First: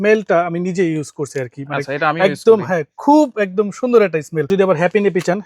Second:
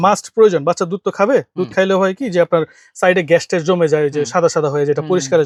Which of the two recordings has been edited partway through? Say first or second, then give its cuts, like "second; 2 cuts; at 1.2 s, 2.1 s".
first; 1 cut; at 4.5 s